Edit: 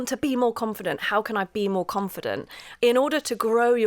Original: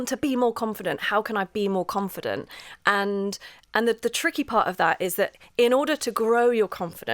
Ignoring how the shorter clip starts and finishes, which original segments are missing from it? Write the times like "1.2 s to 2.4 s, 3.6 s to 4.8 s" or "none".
2.7 s to 5.4 s